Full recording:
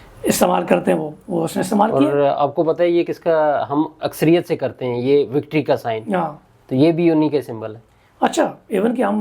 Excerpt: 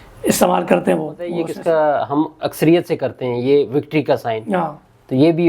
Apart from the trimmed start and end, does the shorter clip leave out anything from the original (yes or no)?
yes